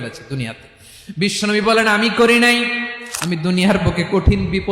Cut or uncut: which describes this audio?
cut